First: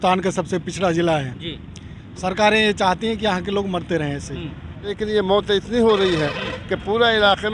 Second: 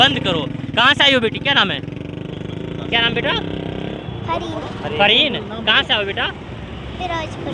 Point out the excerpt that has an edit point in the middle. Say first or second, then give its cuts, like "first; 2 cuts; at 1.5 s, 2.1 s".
first; 1 cut; at 5.0 s